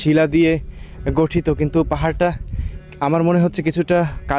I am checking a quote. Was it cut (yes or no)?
no